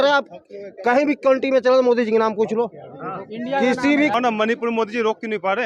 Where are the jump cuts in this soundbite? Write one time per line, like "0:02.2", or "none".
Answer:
0:04.1